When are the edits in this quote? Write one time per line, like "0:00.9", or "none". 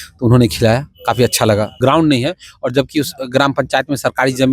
0:01.7